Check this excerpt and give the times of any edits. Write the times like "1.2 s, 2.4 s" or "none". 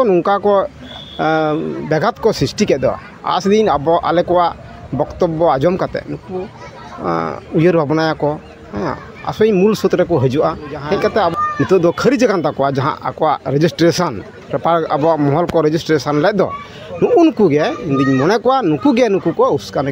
11.3 s